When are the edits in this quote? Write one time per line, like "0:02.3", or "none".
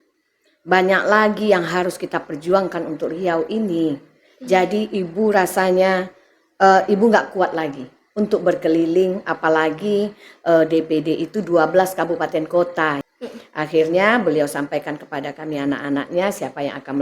0:13.0